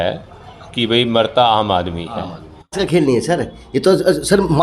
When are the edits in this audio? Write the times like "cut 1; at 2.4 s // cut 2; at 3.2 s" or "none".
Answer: cut 1; at 2.8 s